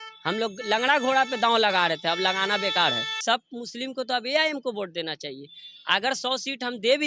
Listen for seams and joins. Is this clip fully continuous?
no; 1 cut; at 3.1 s

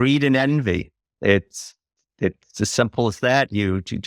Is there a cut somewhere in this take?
no; 0 cuts

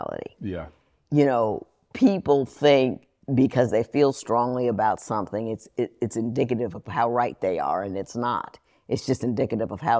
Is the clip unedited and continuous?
yes; 0 cuts

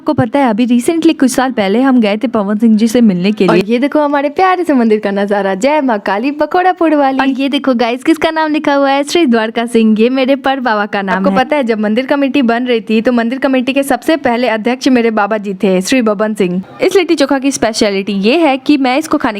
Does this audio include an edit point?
yes; 4 cuts; at 3.6 s, 7.3 s, 11.3 s, 16.6 s

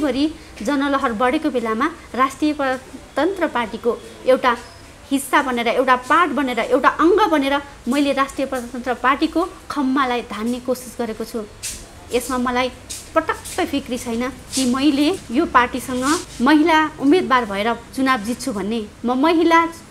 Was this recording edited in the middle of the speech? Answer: no; 0 cuts

